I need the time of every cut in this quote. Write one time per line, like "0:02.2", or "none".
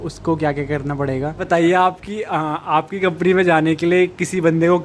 0:01.4